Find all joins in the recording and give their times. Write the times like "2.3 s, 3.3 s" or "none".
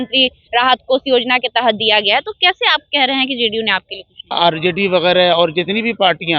4.3 s